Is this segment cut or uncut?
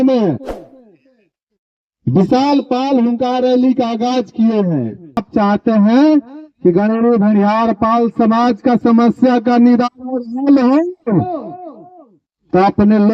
cut